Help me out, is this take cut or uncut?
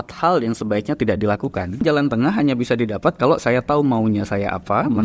cut